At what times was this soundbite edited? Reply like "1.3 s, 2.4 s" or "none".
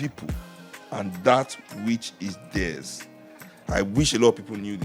none